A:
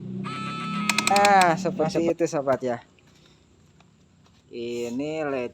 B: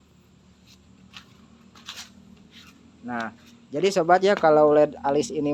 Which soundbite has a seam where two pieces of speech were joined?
A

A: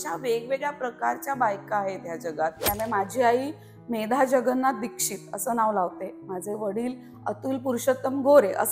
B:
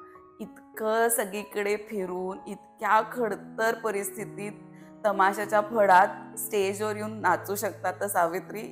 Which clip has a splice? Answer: A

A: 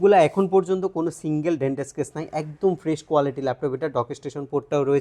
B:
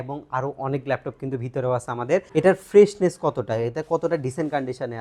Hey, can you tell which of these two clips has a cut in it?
B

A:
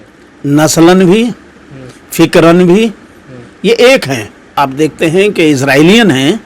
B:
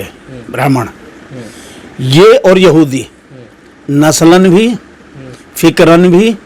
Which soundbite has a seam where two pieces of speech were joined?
A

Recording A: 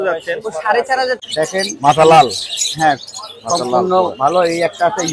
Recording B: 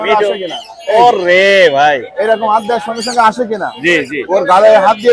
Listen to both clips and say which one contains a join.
A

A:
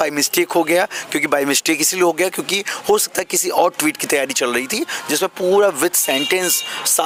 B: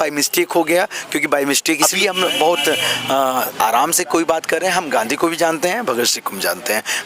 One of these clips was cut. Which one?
B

